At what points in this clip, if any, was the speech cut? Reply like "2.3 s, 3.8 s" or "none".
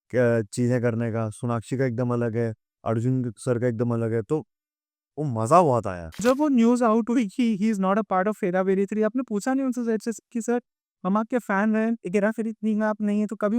6.2 s